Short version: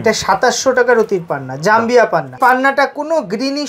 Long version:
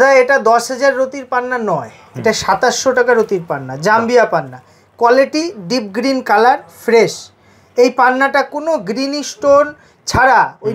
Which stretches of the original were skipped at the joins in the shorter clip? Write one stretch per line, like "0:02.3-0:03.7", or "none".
0:04.6-0:07.9